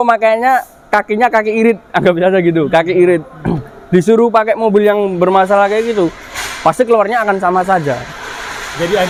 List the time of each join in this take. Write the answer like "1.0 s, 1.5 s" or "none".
none

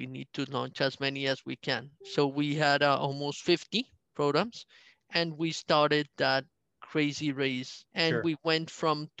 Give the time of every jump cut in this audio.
2.0 s, 7.8 s

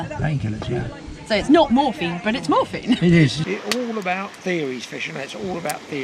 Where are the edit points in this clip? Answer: 3.4 s

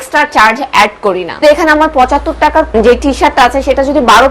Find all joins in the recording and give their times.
1.4 s, 2.7 s

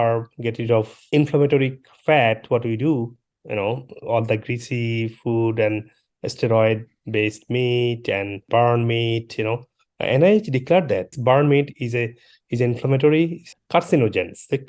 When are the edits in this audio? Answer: none

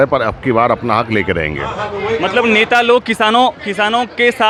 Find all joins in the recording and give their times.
none

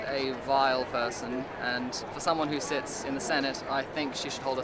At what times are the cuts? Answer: none

